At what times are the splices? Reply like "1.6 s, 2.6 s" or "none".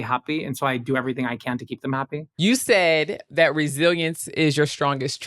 2.2 s